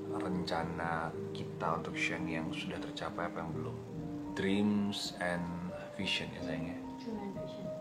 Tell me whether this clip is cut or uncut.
cut